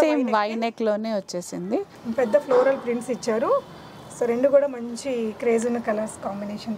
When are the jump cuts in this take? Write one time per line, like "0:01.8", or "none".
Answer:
0:02.0